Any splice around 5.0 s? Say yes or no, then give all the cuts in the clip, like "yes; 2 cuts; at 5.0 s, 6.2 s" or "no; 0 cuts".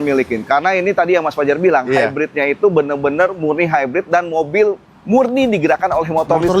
no; 0 cuts